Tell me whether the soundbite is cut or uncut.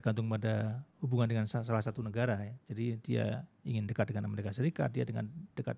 uncut